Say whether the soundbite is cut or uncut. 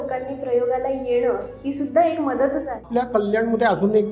cut